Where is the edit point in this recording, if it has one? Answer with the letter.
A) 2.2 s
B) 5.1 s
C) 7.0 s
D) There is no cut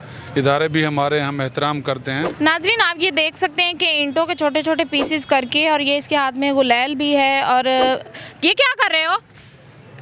A